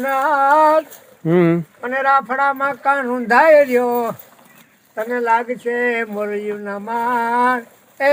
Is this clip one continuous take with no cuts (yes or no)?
yes